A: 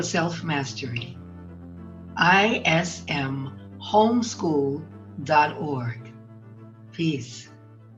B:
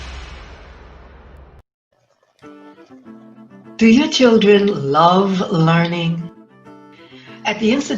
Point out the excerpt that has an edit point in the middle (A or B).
B